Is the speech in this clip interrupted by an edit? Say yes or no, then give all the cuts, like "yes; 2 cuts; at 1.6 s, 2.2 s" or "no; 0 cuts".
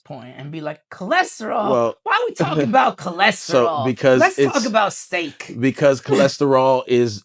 no; 0 cuts